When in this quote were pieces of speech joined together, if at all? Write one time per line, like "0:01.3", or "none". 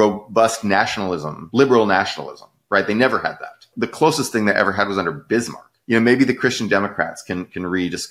0:01.3
0:05.8